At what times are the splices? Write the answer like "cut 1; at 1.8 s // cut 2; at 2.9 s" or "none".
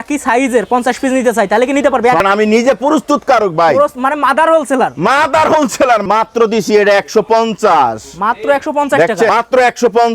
cut 1; at 2.2 s // cut 2; at 6.1 s // cut 3; at 9.3 s